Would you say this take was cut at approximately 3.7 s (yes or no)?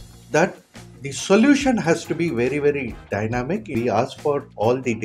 yes